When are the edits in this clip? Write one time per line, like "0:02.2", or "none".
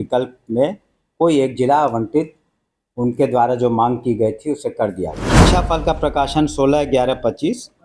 0:05.4